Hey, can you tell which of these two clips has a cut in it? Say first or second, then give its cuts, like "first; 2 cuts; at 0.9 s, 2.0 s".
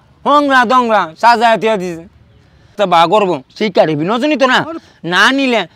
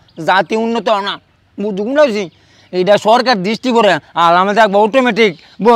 first; 1 cut; at 2.7 s